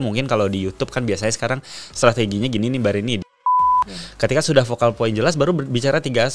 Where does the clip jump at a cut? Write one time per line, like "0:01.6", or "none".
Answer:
0:03.5